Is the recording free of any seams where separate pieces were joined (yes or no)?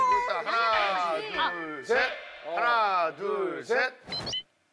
yes